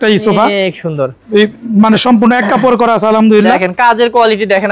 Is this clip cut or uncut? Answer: uncut